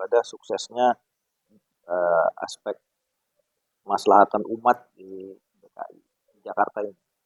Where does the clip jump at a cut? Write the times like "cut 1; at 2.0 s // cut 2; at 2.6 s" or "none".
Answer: none